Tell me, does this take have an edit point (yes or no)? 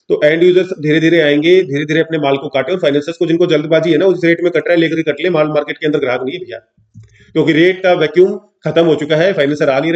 no